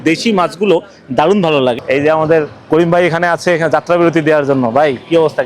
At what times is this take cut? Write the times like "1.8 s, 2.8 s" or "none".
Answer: 1.8 s